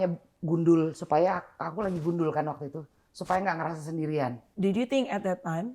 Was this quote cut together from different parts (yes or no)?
yes